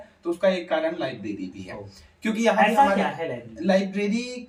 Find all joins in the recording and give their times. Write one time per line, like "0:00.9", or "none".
none